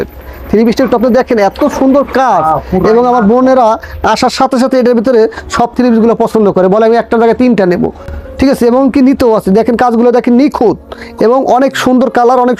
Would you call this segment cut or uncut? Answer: uncut